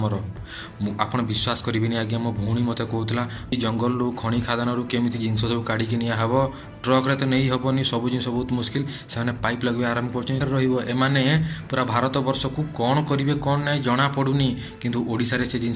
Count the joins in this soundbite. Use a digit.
2